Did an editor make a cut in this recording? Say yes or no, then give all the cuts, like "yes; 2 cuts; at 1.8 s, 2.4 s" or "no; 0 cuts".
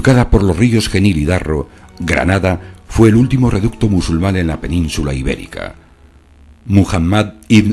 no; 0 cuts